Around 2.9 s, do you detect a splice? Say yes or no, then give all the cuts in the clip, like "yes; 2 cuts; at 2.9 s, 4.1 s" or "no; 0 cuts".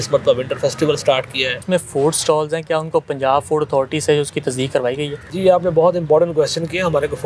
no; 2 cuts; at 1.6 s, 5.2 s